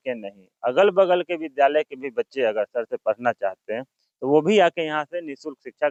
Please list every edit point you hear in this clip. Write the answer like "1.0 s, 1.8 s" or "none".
none